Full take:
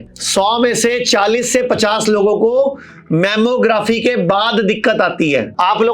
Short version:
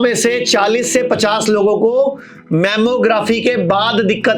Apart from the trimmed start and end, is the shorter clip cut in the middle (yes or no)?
no